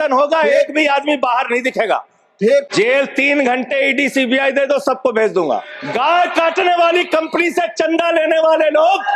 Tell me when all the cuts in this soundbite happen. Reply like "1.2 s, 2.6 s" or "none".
2.7 s, 5.8 s